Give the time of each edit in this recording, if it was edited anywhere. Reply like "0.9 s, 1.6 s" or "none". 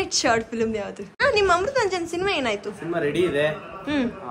1.1 s